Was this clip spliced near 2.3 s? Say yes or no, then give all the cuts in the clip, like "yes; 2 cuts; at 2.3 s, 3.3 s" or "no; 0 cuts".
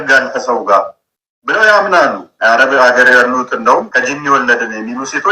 yes; 2 cuts; at 2.3 s, 3.9 s